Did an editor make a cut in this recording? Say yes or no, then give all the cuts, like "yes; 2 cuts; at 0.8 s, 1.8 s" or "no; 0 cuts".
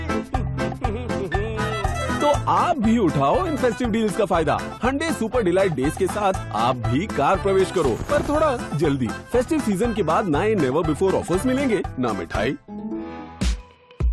yes; 1 cut; at 13.1 s